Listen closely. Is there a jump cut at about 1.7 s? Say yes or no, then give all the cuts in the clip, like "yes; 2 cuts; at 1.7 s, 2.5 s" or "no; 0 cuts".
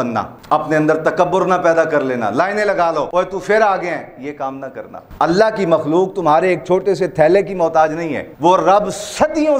no; 2 cuts; at 3.1 s, 5.0 s